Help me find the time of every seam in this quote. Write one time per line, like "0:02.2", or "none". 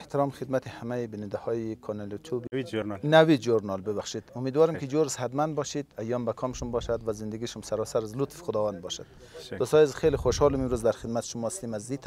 none